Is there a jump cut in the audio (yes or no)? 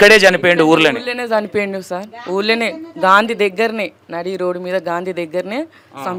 no